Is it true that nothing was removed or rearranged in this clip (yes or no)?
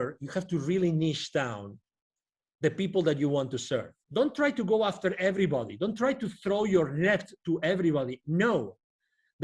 no